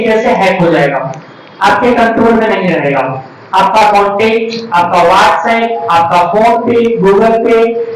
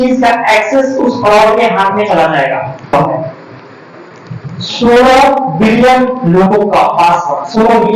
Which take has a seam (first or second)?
second